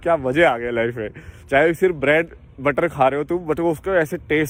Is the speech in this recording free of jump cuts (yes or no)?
yes